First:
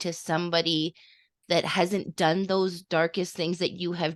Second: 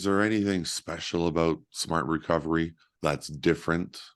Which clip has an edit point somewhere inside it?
second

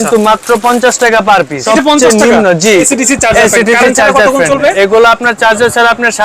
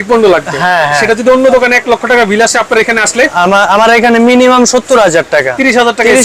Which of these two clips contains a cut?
first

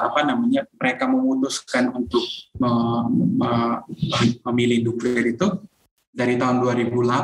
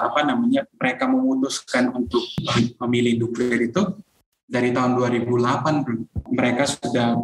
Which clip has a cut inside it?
second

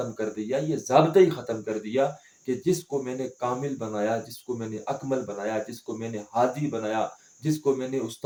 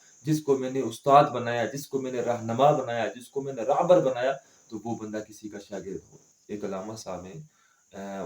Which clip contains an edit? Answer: second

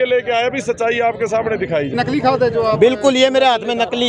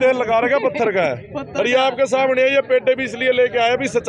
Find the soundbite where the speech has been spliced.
first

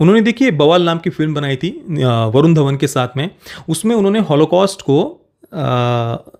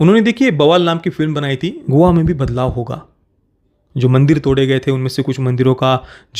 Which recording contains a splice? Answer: second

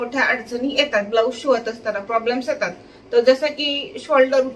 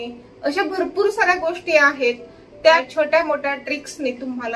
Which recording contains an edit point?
second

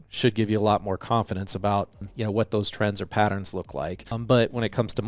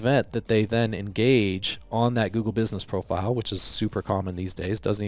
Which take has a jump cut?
first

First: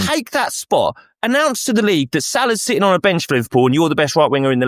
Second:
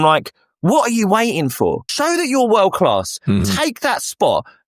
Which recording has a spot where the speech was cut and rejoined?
second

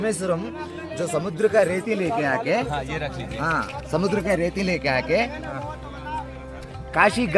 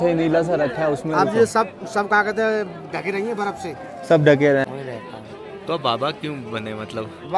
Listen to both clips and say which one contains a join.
second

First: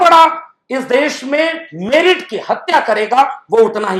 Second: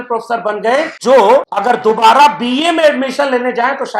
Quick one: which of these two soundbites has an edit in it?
second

